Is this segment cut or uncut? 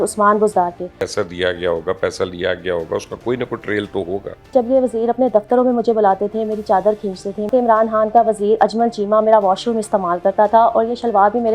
cut